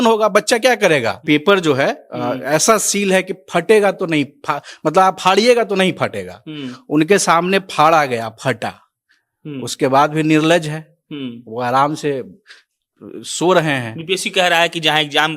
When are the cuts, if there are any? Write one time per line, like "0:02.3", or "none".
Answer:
0:01.2